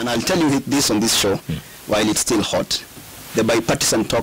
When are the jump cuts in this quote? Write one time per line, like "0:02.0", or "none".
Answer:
none